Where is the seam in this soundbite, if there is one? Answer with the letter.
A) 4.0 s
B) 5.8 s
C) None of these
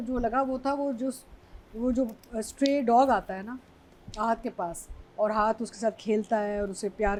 C